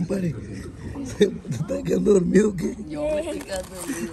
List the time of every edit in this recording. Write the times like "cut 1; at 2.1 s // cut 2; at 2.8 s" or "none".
none